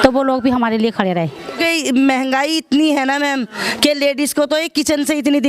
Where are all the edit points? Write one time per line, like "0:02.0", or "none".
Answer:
0:01.6